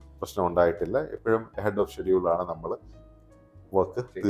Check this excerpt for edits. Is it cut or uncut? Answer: uncut